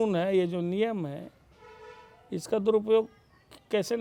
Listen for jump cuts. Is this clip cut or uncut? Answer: uncut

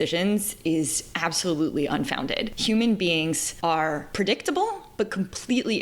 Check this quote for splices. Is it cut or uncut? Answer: cut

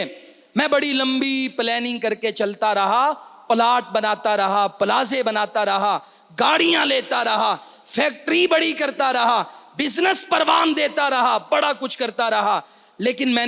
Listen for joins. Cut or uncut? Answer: uncut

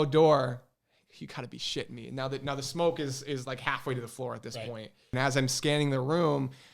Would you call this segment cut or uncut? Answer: cut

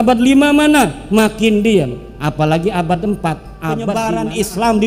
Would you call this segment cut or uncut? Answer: cut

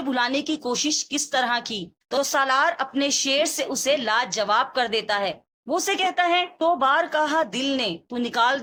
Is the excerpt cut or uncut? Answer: uncut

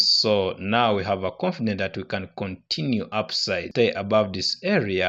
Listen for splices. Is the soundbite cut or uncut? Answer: cut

